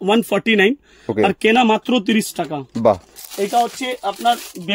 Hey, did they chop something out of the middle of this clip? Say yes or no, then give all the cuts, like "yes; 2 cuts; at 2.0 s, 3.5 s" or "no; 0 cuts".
yes; 1 cut; at 3.1 s